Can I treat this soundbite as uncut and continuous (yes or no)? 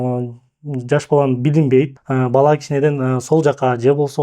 no